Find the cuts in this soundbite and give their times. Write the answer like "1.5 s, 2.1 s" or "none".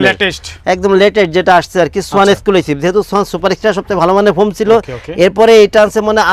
none